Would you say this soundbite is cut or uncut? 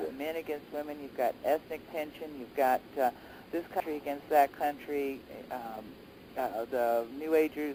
uncut